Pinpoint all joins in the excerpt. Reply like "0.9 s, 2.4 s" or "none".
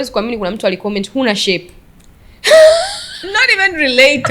none